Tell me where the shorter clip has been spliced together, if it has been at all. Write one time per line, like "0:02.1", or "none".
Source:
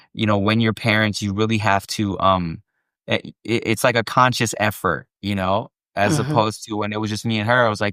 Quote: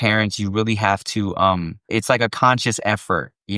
0:01.9

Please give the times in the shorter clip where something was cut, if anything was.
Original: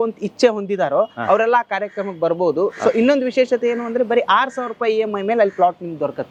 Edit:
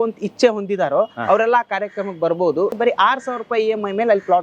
0:02.8

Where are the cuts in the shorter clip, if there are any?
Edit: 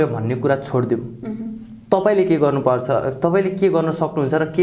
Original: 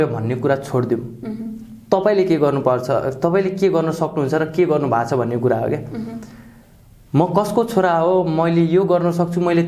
none

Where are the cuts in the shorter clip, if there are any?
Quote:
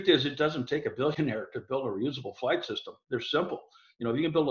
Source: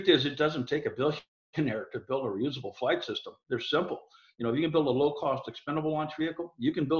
0:01.1

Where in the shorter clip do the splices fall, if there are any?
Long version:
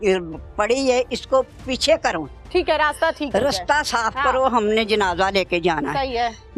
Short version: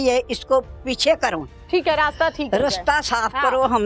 none

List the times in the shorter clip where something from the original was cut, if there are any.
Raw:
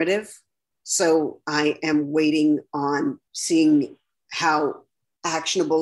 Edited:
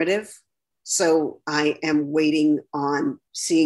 none

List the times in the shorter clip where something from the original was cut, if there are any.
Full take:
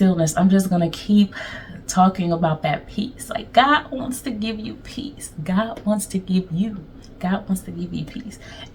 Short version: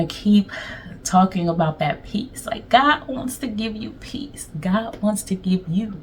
none

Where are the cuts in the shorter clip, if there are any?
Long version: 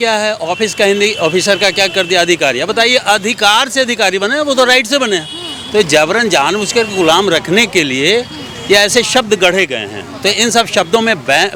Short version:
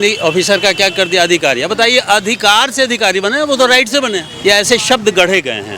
0:04.3

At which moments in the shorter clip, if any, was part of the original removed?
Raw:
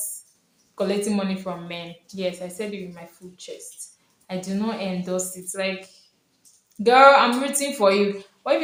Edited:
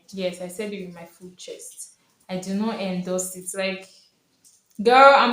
none

